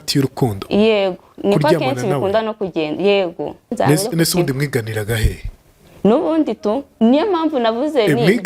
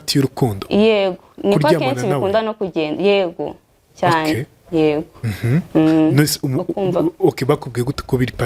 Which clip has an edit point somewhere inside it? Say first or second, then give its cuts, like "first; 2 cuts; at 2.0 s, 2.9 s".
first; 1 cut; at 3.7 s